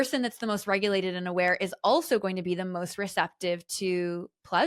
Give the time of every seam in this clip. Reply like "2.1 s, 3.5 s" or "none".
none